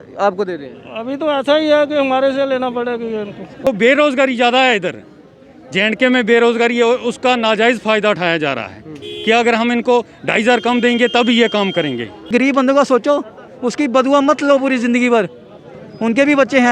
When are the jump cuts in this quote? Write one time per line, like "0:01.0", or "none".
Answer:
0:03.7
0:12.3